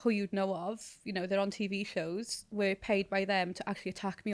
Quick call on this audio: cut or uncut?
uncut